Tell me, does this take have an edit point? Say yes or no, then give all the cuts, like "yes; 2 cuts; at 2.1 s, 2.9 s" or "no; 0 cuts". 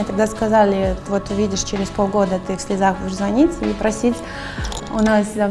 no; 0 cuts